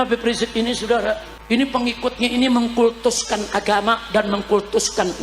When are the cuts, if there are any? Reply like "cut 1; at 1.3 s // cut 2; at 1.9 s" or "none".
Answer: cut 1; at 1.3 s